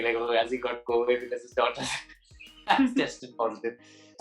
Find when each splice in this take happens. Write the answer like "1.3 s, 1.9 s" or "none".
none